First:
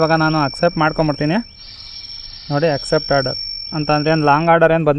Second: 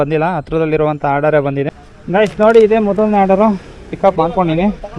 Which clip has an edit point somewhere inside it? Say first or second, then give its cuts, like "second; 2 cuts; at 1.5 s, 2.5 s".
second; 1 cut; at 1.9 s